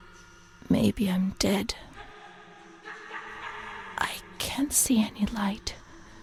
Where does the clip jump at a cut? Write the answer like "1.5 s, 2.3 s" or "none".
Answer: none